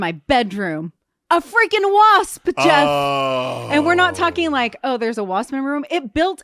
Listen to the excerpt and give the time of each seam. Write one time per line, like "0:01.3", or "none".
0:01.1